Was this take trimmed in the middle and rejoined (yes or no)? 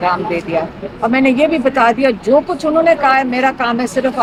no